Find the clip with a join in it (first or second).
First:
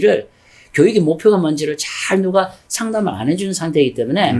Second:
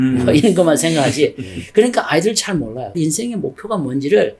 second